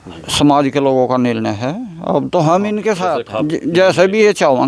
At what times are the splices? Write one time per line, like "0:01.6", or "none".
0:03.3